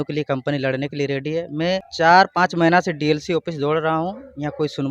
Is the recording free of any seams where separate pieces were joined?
no; 1 cut; at 1.9 s

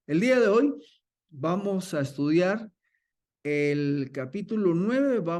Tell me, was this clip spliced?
no; 0 cuts

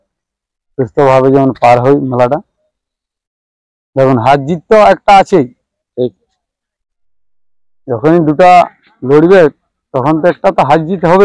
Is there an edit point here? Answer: no; 0 cuts

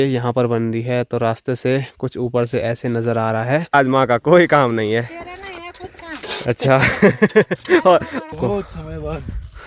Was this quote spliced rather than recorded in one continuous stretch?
yes; 2 cuts; at 3.7 s, 8.4 s

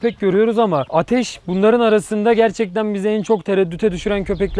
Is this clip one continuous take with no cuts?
yes; 0 cuts

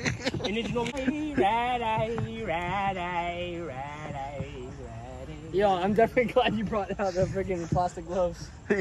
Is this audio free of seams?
no; 1 cut; at 1.0 s

